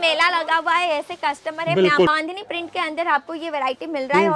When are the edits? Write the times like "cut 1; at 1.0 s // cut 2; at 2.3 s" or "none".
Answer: cut 1; at 2.1 s